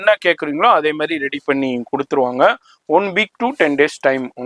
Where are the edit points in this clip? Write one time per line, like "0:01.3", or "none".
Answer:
none